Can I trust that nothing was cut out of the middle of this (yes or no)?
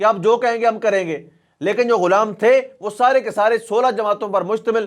yes